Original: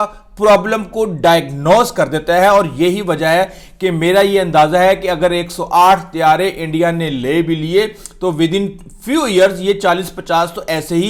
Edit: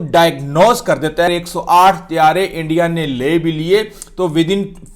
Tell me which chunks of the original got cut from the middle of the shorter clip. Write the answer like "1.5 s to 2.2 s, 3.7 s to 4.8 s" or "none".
2.4 s to 5.3 s

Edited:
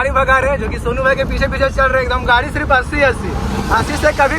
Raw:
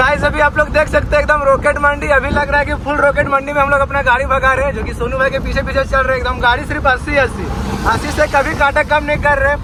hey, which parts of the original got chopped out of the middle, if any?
none

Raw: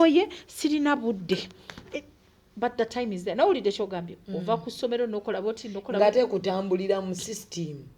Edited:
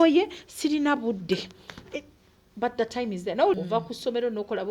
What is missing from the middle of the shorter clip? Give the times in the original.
3.6 s to 4.3 s

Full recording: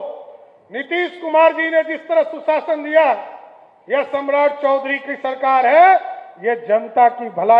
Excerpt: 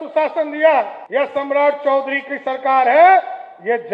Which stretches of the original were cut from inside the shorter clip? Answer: 3.3 s to 3.8 s

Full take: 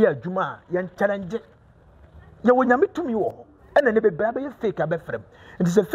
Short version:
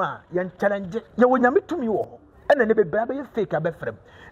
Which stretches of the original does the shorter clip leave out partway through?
1.4 s to 2.3 s

